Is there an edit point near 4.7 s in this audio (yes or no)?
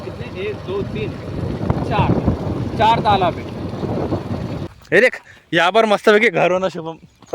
yes